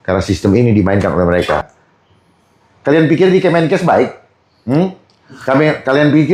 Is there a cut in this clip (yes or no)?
yes